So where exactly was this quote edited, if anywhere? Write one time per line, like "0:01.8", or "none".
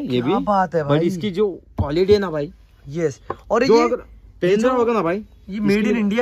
none

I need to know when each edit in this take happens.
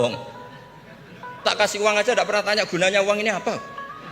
0:01.4

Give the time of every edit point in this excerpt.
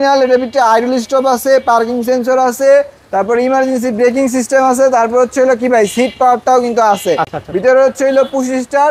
none

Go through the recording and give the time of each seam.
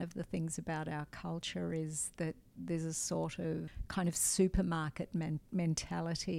0:03.8

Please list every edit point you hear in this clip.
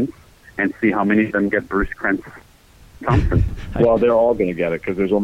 0:03.5

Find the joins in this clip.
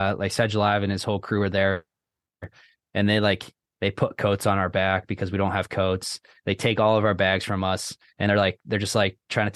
none

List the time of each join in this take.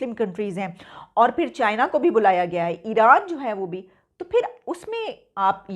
none

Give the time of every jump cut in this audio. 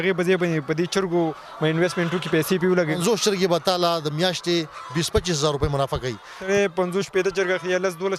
0:03.0
0:06.5

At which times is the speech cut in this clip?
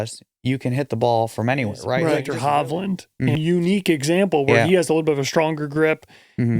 0:02.2
0:03.4

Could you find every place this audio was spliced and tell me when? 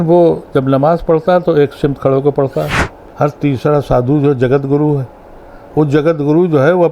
0:03.0

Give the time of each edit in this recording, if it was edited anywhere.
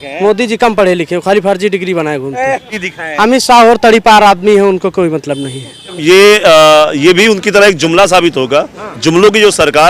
0:03.0
0:06.0

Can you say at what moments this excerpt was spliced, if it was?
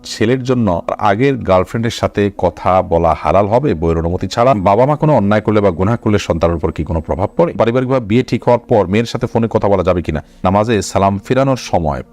0:01.0
0:04.6
0:07.5
0:10.4

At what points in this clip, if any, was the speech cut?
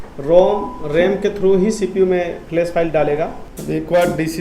0:03.5

